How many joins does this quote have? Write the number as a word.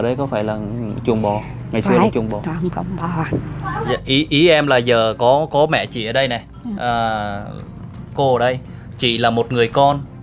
one